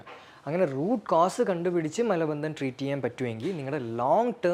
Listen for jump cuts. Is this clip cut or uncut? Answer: uncut